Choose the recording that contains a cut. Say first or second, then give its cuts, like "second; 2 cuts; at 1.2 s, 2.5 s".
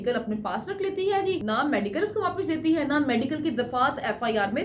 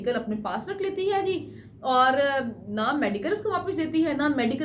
first; 1 cut; at 1.4 s